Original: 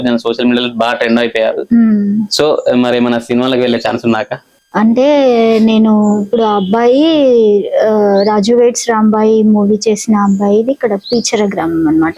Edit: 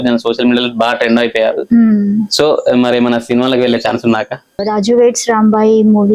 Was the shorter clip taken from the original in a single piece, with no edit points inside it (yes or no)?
no